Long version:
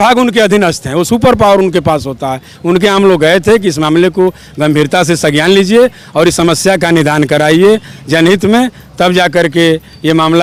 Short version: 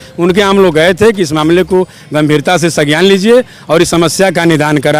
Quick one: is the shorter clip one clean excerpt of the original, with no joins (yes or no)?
yes